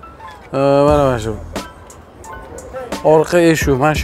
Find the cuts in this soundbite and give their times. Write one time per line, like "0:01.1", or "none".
0:02.8